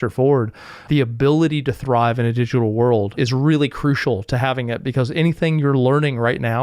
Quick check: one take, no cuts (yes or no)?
no